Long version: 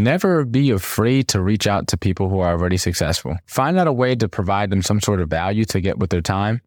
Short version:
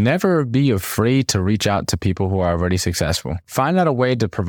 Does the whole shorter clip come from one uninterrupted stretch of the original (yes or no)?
yes